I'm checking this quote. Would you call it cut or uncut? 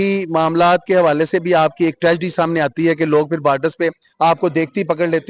uncut